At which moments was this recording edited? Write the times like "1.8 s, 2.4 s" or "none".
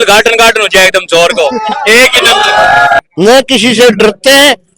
3.0 s